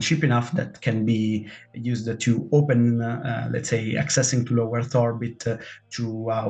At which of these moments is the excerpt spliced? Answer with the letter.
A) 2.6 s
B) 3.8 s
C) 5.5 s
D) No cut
D